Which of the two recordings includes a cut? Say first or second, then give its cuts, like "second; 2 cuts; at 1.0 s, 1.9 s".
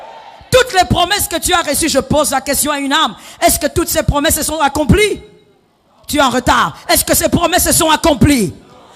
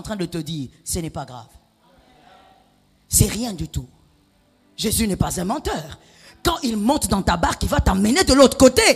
second; 1 cut; at 4.5 s